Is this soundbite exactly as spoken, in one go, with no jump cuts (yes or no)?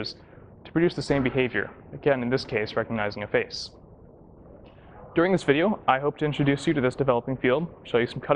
no